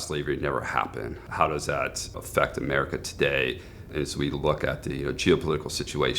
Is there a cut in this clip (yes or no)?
yes